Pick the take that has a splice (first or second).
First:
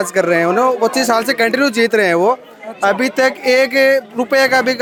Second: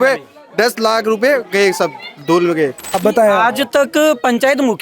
second